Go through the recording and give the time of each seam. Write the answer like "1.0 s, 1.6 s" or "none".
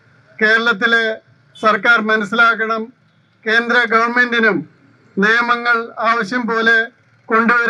none